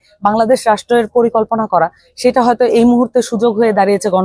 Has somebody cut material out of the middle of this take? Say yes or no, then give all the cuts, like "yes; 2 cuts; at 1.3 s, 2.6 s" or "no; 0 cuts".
no; 0 cuts